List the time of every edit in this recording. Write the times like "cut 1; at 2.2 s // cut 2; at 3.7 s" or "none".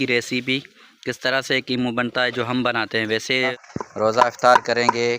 cut 1; at 3.5 s